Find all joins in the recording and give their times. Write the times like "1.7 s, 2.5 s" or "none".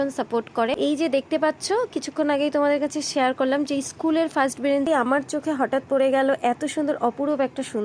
0.8 s, 4.9 s

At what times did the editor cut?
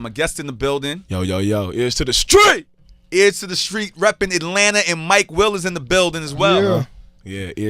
1.5 s

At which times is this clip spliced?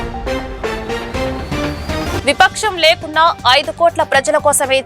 2.1 s

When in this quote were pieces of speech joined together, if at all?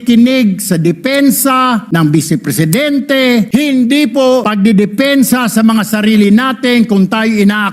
1.9 s, 3.5 s, 4.5 s

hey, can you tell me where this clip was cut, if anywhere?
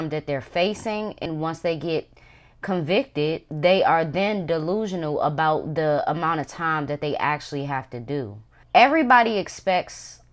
1.2 s, 8.6 s

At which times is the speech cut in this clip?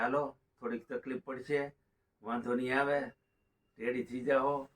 none

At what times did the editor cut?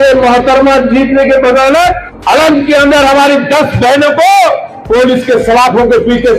2.1 s

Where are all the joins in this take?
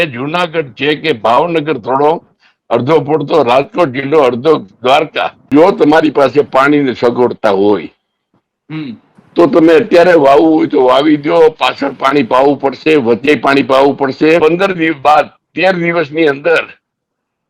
5.5 s, 14.4 s

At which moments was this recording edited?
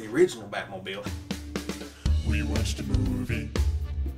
1.0 s

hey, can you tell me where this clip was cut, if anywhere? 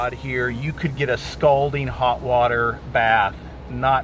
none

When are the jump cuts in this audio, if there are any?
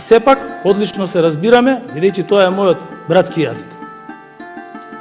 none

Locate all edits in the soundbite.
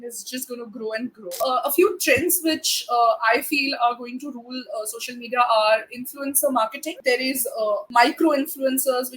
1.4 s, 7.3 s

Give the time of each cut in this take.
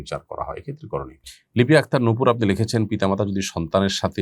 1.2 s

